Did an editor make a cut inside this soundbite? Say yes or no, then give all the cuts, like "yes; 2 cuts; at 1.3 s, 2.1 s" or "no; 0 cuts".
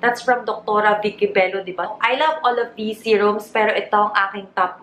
yes; 1 cut; at 1.9 s